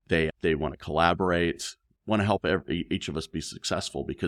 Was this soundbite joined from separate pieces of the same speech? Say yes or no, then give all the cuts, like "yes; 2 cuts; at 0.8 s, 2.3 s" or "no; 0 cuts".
no; 0 cuts